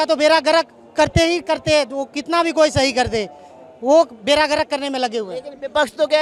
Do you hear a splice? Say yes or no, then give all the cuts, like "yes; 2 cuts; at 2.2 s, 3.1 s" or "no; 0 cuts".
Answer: no; 0 cuts